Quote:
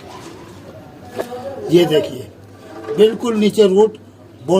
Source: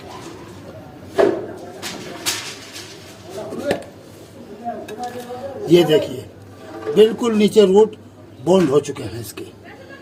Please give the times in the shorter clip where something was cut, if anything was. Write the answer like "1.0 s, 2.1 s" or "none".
1.1 s